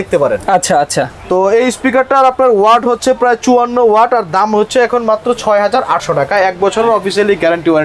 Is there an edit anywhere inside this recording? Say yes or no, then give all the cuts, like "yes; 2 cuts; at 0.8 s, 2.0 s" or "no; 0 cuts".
no; 0 cuts